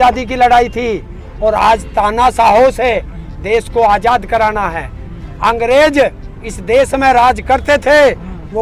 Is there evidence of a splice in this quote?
no; 0 cuts

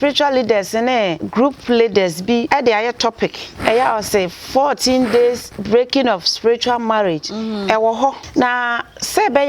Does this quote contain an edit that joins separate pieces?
yes; 5 cuts; at 1.2 s, 2.5 s, 3.5 s, 5.5 s, 8.2 s

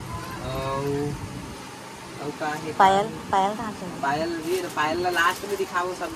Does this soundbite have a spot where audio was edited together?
no; 0 cuts

